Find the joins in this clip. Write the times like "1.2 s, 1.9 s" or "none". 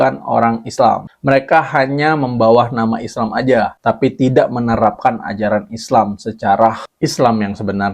none

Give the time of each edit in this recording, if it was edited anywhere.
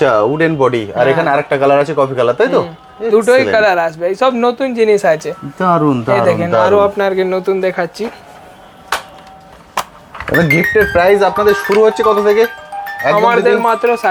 none

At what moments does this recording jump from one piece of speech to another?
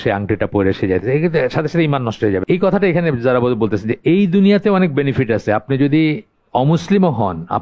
2.4 s

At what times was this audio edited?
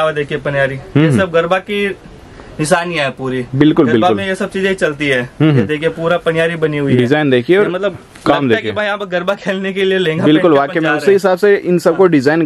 none

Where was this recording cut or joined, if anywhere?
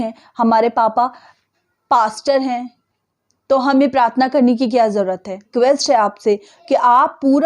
5.5 s

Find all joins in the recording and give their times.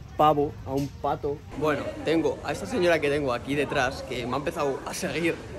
1.5 s

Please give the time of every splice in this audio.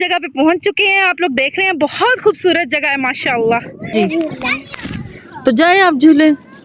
3.9 s

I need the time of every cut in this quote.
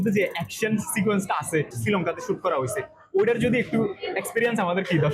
1.7 s

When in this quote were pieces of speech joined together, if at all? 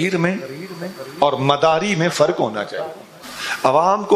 none

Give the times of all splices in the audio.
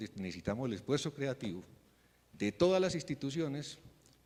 none

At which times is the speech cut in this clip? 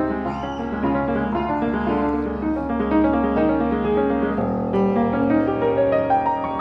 4.7 s

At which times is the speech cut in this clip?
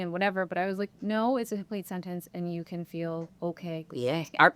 3.3 s

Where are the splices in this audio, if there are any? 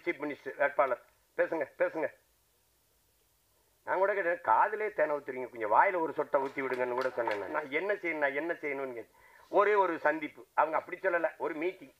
7.5 s

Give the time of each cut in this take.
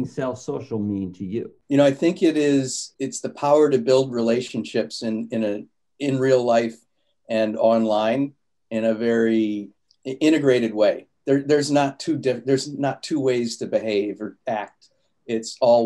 1.6 s, 2.8 s

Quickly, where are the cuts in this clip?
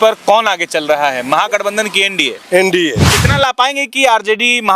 3.2 s

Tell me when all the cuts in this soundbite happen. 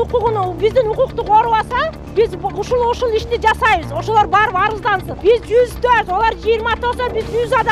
2.0 s, 5.1 s

